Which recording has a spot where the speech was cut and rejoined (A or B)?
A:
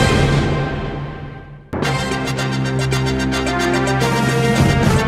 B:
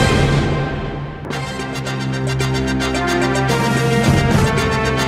B